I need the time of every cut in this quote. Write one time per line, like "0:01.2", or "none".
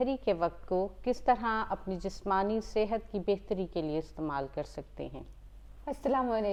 none